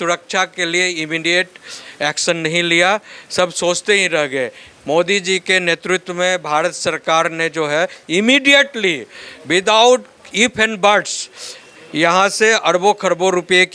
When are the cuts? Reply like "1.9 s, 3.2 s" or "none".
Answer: none